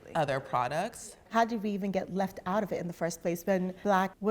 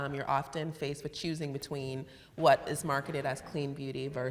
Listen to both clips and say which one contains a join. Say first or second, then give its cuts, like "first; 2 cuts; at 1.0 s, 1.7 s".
first; 1 cut; at 1.1 s